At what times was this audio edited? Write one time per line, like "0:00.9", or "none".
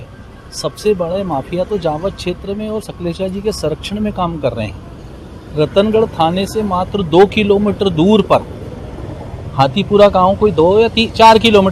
none